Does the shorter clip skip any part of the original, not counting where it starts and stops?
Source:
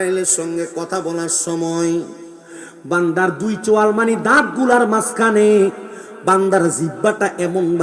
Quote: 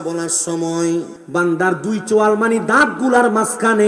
yes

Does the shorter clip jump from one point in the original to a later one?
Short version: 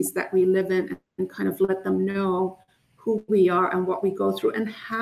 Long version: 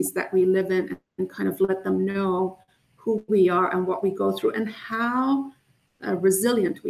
no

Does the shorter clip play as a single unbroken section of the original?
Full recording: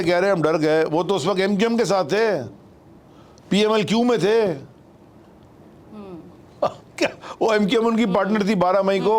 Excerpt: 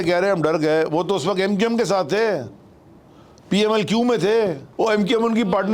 no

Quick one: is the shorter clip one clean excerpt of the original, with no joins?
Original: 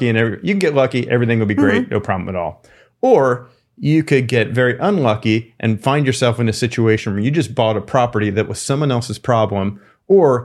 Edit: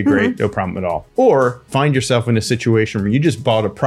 no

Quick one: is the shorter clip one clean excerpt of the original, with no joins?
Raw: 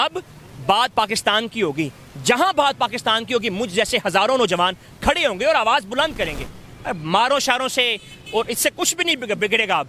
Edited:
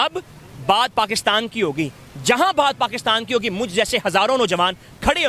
yes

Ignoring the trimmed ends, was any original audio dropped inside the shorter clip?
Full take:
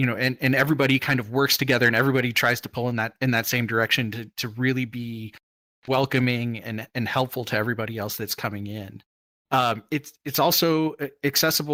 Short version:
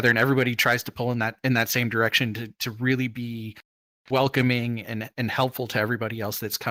no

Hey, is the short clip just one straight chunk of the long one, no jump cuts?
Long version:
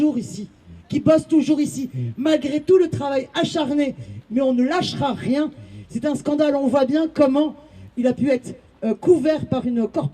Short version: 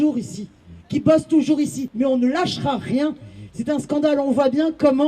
no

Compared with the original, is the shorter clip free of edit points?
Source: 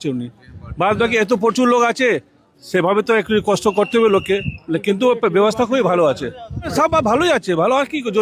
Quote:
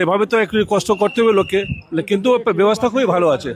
yes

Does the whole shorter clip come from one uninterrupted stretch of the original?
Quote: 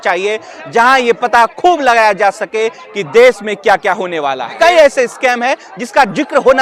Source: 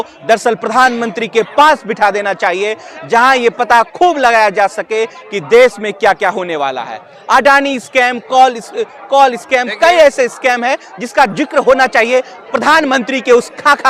no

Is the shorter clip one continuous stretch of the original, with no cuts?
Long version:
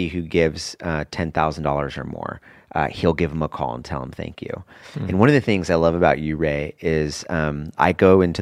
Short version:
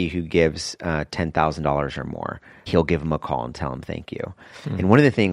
no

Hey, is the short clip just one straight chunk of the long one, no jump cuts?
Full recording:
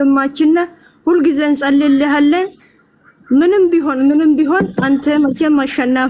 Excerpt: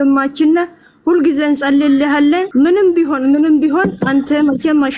no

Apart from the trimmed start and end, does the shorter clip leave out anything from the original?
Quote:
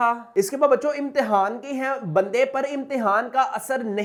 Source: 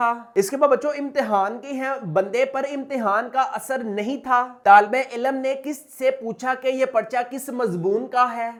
no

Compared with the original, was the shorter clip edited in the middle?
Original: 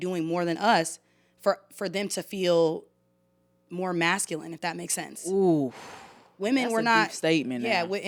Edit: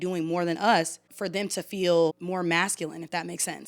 yes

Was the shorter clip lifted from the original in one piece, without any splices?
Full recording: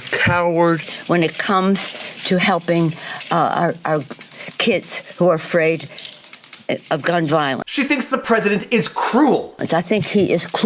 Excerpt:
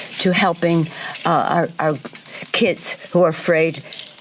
yes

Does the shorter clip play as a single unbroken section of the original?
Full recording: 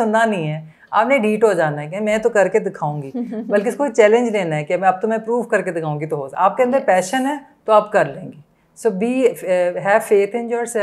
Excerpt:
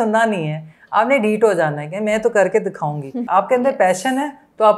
no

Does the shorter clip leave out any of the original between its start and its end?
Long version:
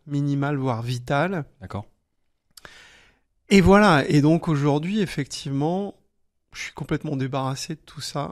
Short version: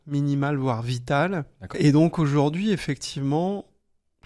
yes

